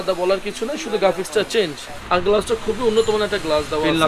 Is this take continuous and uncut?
no; 1 cut; at 1.9 s

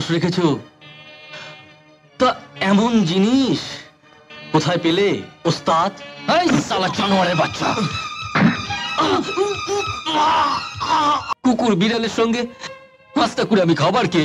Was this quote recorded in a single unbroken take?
no; 1 cut; at 11.3 s

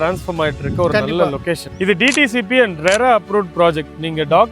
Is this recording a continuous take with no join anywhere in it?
no; 1 cut; at 1.7 s

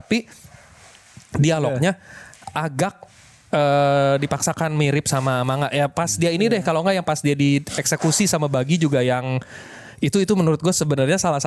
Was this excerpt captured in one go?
yes; 0 cuts

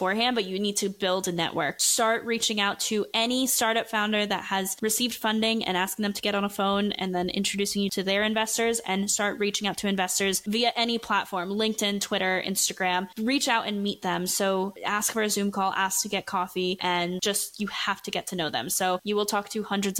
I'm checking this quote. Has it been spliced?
yes; 3 cuts; at 1.8 s, 7.9 s, 16.8 s

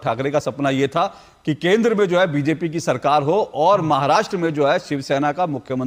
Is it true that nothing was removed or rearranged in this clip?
yes; 0 cuts

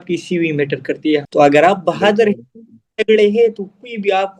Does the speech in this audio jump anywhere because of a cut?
yes; 1 cut; at 0.9 s

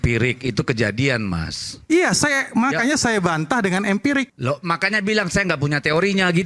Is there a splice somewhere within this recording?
no; 0 cuts

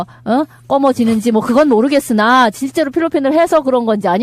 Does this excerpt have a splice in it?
yes; 1 cut; at 1.7 s

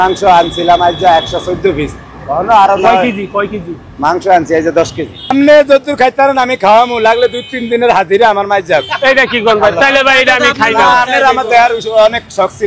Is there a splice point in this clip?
yes; 1 cut; at 5.3 s

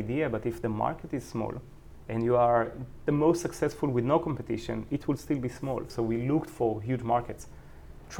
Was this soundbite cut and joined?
yes; 1 cut; at 5.9 s

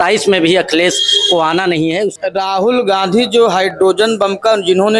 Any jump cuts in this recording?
yes; 1 cut; at 2.2 s

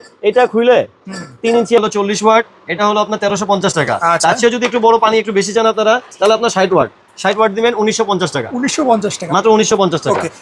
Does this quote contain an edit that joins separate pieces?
yes; 1 cut; at 1.8 s

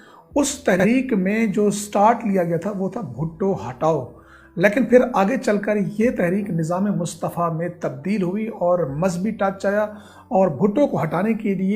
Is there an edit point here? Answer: no; 0 cuts

